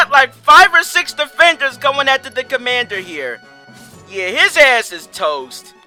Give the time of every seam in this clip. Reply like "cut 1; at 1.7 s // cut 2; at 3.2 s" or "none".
none